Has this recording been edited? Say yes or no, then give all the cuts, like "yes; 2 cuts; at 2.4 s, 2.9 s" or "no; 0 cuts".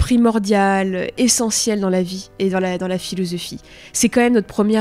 no; 0 cuts